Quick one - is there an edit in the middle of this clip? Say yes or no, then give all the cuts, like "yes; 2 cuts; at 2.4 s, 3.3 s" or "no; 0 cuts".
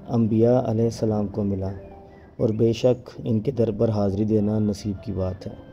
no; 0 cuts